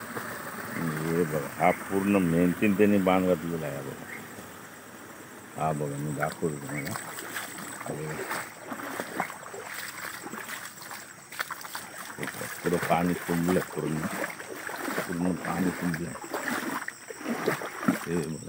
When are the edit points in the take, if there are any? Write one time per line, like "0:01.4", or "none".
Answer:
none